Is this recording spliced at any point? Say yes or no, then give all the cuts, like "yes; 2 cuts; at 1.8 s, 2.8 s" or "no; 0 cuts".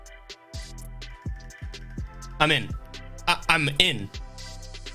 no; 0 cuts